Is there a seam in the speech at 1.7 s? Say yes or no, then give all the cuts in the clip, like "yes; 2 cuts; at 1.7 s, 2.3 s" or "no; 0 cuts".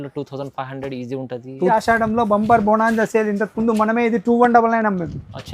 yes; 1 cut; at 1.7 s